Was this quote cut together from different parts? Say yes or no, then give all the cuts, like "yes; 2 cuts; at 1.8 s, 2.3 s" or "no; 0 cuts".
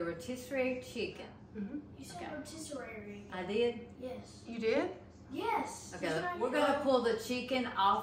yes; 2 cuts; at 1.4 s, 6.4 s